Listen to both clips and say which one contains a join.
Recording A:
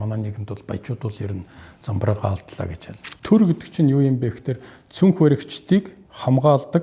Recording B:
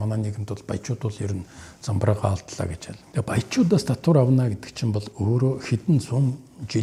A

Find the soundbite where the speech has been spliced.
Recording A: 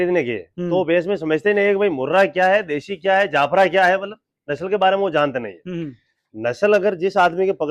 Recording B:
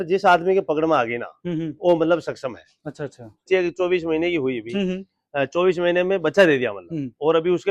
B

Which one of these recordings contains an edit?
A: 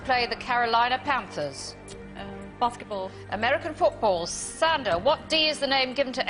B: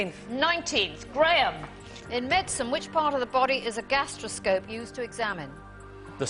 A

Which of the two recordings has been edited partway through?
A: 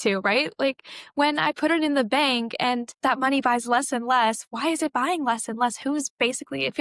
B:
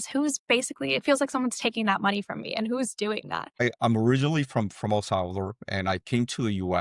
B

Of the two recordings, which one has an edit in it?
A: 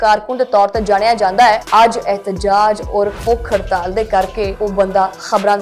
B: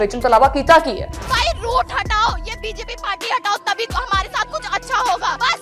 A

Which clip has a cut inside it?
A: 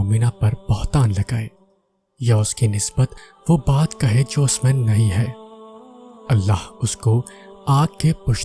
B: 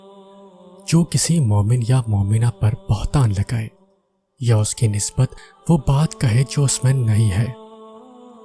B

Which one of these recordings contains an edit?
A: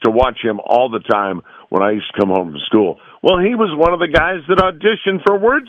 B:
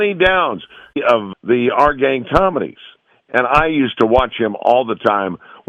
B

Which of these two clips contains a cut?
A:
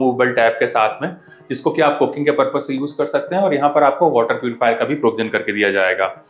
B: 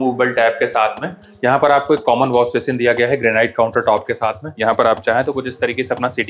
B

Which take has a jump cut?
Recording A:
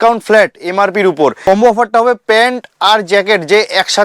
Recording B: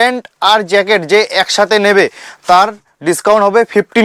A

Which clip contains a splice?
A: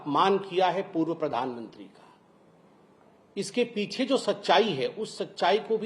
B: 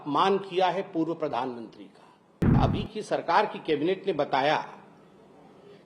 B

